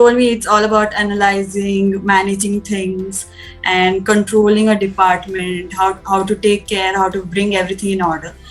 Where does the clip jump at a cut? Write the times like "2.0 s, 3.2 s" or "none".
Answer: none